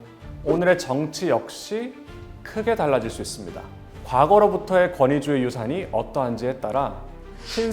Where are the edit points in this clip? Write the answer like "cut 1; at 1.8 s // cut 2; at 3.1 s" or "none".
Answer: cut 1; at 4.1 s